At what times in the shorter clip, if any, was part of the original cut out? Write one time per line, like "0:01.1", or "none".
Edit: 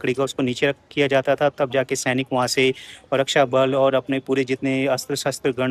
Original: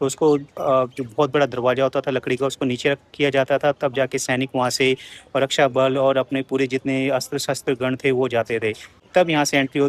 none